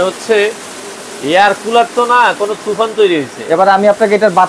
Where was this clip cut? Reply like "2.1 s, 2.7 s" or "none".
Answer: none